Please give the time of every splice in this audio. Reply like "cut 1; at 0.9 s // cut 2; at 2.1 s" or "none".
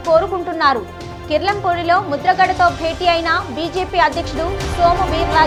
none